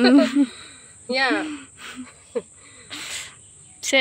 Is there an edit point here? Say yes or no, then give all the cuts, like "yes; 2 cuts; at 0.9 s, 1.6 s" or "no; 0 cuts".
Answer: no; 0 cuts